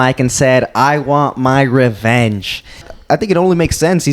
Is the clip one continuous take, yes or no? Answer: no